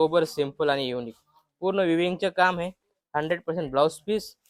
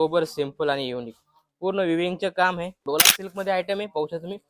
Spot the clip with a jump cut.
second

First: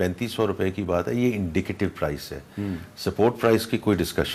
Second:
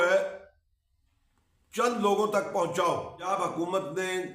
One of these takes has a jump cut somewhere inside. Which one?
second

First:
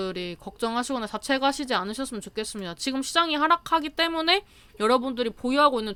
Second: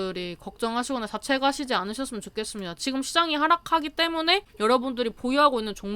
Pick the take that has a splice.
second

